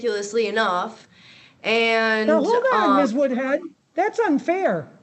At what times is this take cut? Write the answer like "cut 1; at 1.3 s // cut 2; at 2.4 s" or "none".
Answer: none